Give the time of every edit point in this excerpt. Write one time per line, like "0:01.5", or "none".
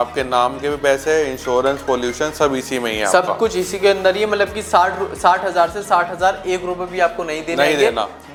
none